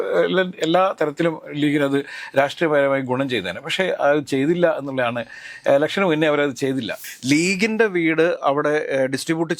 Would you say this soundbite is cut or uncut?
cut